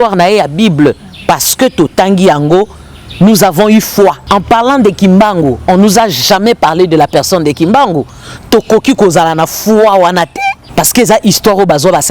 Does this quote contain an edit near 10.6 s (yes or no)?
yes